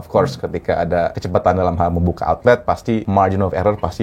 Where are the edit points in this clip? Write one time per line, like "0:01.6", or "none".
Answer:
0:01.2
0:03.0

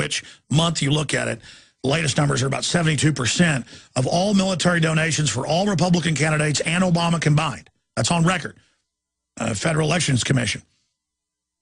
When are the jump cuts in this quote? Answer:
none

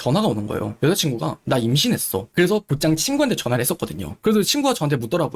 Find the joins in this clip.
0:02.3

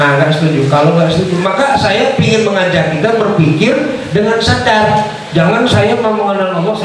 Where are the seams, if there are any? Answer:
none

